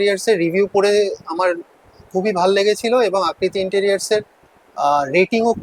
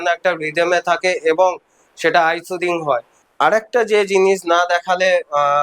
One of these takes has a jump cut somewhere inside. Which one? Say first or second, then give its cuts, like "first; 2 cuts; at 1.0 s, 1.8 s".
second; 1 cut; at 3.2 s